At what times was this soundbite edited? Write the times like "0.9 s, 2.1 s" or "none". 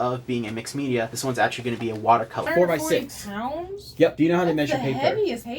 2.5 s